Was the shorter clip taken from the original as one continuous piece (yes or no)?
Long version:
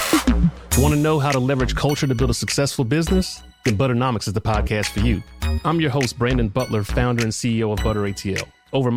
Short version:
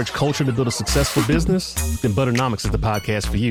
yes